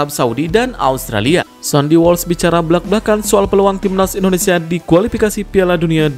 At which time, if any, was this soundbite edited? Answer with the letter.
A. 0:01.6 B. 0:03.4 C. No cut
A